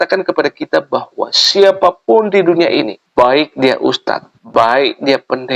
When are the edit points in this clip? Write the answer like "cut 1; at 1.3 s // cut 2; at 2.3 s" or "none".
cut 1; at 3.0 s // cut 2; at 4.3 s